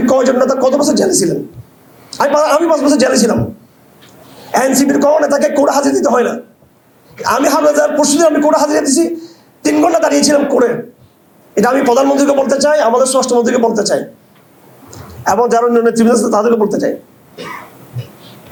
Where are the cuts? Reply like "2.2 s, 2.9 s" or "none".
none